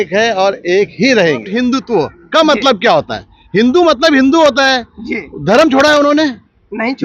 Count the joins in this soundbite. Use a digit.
1